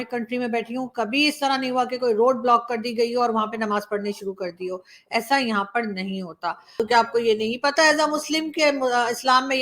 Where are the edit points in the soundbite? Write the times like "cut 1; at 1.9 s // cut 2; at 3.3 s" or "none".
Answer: cut 1; at 6.6 s